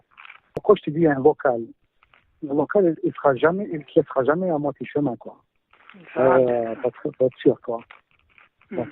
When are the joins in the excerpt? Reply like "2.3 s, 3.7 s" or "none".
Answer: 6.7 s